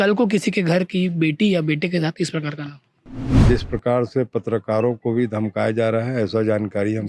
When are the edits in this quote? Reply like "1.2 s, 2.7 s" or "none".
3.4 s

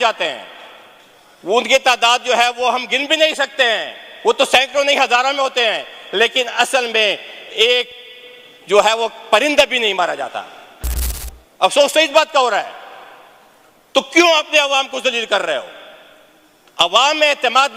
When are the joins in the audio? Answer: none

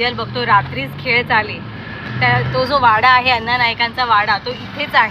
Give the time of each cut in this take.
none

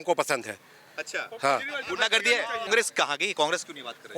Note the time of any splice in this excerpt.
2.7 s

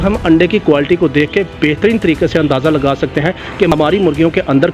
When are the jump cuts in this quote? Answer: 3.7 s

